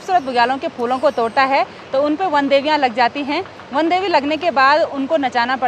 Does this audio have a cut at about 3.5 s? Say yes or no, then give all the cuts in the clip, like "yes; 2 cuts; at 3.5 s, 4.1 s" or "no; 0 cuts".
no; 0 cuts